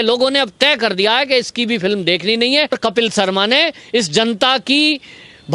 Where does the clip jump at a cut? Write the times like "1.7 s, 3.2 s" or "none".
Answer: 2.8 s